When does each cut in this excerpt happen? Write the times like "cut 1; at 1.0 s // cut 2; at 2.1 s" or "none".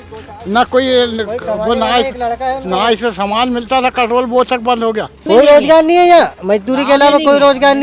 cut 1; at 5.2 s

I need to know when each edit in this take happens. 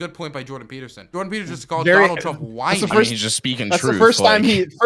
cut 1; at 1.0 s

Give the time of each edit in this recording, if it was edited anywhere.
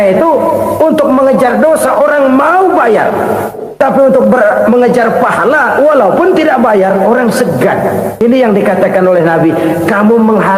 cut 1; at 8.2 s

